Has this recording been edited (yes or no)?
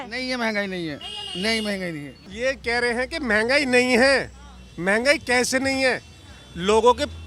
yes